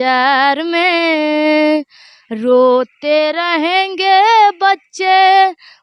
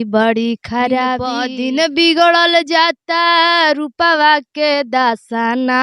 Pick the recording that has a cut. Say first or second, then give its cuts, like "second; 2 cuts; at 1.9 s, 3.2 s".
second; 1 cut; at 1.4 s